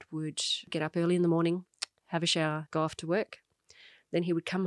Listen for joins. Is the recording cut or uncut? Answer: cut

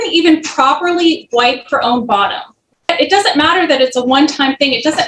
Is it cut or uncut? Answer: cut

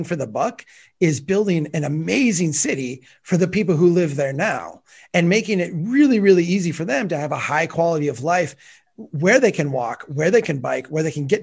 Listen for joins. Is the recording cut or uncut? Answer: uncut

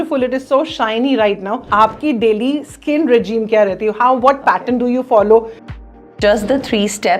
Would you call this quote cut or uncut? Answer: cut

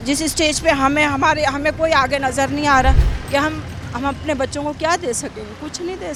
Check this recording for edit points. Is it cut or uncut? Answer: uncut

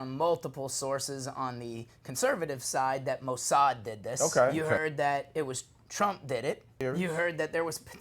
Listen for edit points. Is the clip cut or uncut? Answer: cut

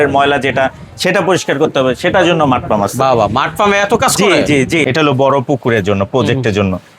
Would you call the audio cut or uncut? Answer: cut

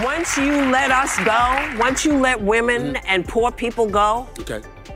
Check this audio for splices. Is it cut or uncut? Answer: uncut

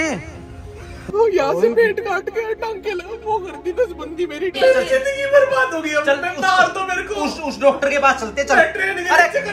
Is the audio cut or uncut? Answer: cut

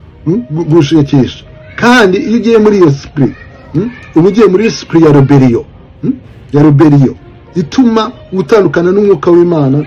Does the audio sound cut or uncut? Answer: uncut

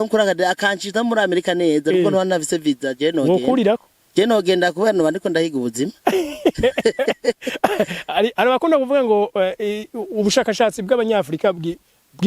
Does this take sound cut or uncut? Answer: uncut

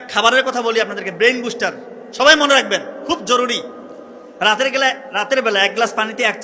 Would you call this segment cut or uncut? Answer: uncut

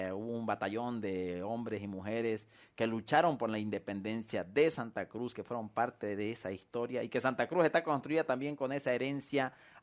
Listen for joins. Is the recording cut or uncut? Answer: uncut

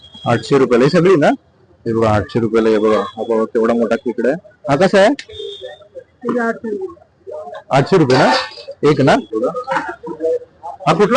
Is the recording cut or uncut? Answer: cut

